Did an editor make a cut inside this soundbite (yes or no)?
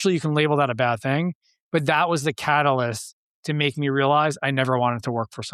no